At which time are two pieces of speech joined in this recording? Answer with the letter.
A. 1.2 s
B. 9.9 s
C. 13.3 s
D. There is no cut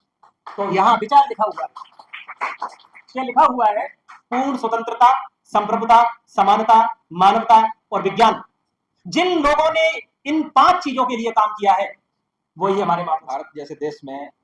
C